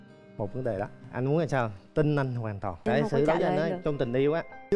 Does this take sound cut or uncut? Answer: cut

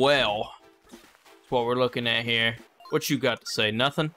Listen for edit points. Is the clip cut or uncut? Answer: cut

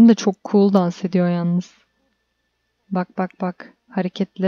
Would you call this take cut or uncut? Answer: uncut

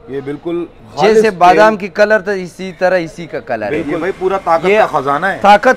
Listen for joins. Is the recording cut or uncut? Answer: cut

